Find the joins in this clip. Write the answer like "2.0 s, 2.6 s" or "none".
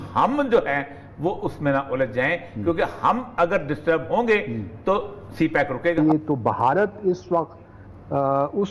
6.0 s